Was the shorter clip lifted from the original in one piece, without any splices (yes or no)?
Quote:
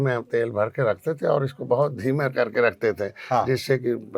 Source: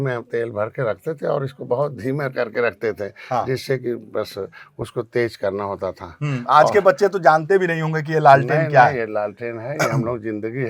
yes